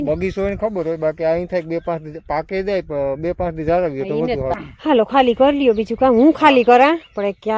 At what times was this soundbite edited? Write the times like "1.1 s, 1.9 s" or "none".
4.5 s